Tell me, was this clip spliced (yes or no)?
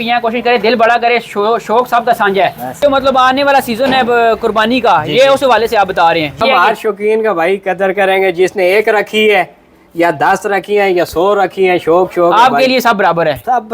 yes